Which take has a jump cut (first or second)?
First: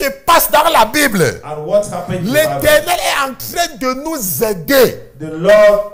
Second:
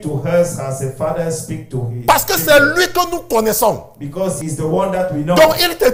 second